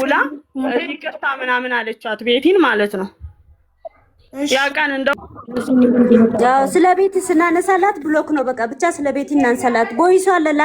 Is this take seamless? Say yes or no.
no